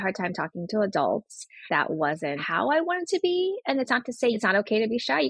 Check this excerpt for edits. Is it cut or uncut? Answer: cut